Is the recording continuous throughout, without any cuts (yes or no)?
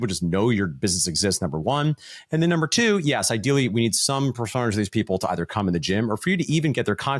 yes